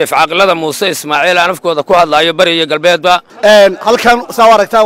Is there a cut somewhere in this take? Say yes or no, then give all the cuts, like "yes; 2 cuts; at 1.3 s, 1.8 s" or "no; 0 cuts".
yes; 1 cut; at 3.3 s